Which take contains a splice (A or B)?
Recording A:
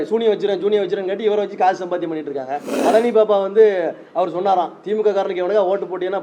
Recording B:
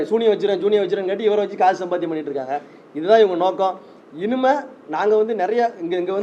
A